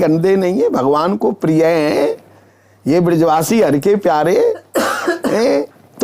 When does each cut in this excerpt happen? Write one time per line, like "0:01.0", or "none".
none

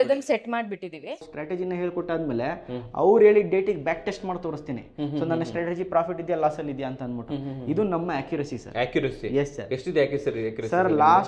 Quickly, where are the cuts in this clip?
0:01.3

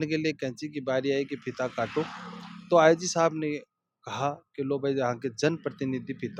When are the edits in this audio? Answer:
none

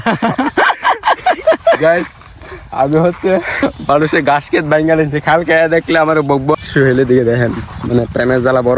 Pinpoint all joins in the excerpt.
0:01.8
0:03.6
0:06.5
0:07.7

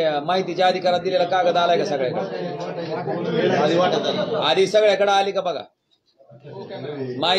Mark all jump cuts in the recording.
none

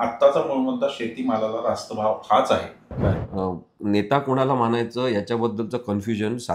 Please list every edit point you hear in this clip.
0:03.2

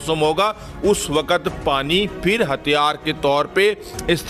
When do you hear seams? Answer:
none

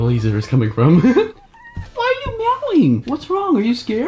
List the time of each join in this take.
0:02.0
0:03.1

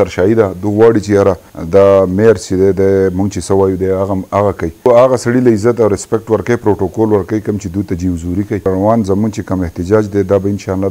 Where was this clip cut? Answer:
0:01.5
0:04.8
0:08.6

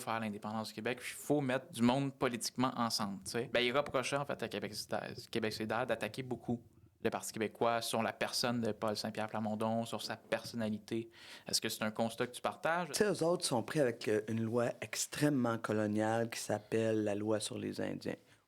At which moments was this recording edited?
0:01.7
0:03.5
0:12.9

